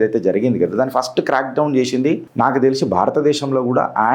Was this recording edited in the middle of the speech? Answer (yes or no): yes